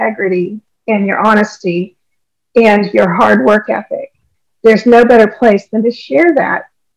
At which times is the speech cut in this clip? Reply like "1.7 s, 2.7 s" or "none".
none